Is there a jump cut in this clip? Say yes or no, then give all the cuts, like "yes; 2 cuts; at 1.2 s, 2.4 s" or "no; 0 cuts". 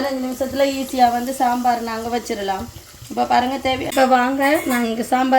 yes; 1 cut; at 3.9 s